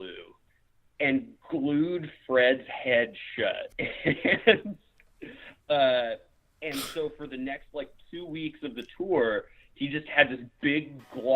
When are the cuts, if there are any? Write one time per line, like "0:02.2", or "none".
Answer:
0:03.7

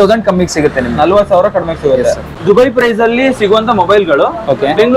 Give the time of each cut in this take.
0:02.3

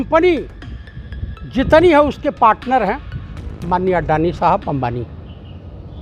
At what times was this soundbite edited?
none

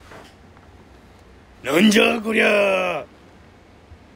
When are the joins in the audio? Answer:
0:01.2

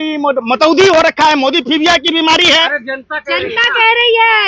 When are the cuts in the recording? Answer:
none

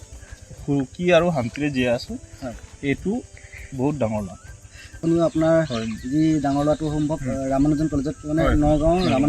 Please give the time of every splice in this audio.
0:04.9

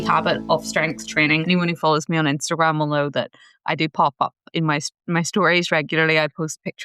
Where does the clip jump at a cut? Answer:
0:01.4

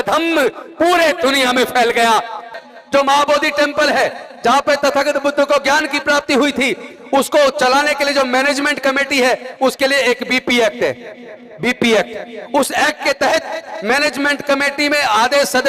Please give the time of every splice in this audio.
0:02.5

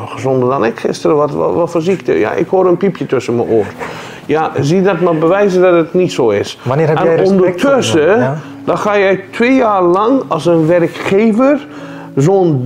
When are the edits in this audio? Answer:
none

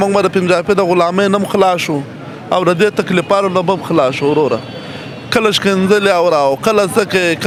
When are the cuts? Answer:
none

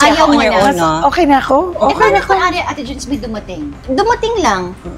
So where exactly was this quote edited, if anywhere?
none

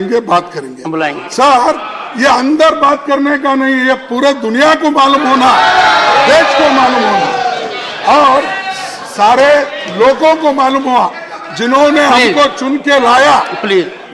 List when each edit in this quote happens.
none

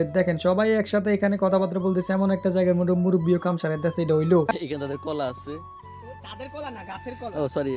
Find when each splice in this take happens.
0:04.5

